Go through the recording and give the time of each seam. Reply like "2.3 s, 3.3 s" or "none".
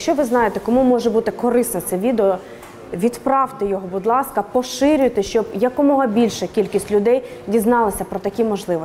none